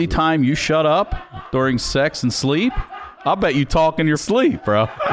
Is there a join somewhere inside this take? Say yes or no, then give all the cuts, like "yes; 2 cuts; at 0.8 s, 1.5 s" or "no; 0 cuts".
yes; 1 cut; at 4.2 s